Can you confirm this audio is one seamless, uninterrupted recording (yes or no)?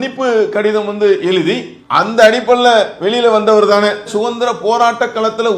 yes